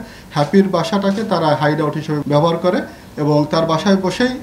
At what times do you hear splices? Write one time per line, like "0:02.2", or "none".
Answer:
0:02.2